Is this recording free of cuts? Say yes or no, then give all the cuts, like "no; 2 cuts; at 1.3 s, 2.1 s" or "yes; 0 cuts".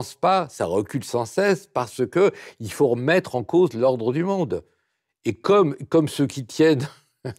yes; 0 cuts